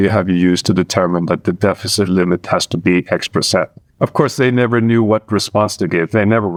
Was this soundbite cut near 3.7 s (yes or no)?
no